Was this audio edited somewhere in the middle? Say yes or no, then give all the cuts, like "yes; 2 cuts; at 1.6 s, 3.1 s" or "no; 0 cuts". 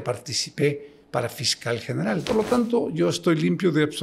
yes; 1 cut; at 2.2 s